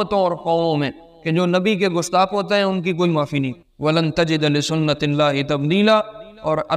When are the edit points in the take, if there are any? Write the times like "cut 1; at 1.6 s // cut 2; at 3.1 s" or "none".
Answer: cut 1; at 3.7 s